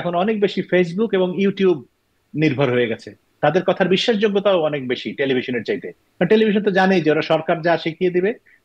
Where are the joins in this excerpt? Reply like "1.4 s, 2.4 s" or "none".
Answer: 3.2 s